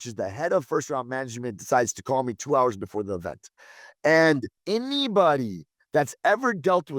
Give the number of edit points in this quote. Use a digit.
1